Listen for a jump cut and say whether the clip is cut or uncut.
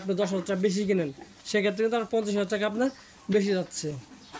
uncut